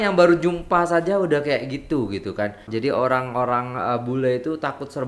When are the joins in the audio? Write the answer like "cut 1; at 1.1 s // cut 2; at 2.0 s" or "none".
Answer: cut 1; at 2.6 s